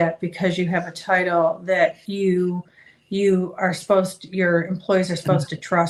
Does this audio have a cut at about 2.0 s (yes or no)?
no